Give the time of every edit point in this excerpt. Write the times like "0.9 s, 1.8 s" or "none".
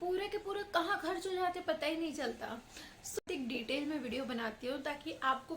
3.2 s